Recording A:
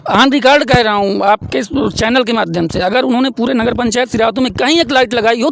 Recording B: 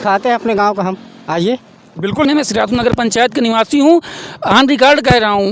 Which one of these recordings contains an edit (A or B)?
B